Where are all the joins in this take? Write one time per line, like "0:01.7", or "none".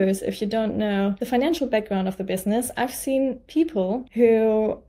0:01.2
0:04.1